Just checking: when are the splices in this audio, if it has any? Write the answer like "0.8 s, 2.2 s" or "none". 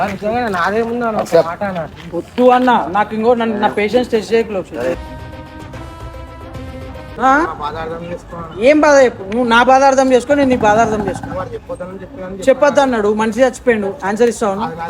7.1 s